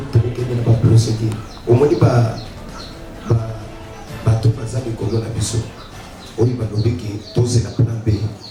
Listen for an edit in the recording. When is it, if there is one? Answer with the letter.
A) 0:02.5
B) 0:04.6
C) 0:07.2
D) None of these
D